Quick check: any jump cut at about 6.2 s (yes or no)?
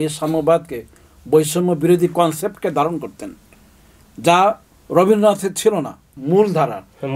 yes